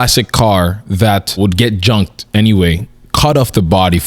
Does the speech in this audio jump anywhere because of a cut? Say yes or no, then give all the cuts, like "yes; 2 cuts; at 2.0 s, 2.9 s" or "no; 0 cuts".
yes; 1 cut; at 1.4 s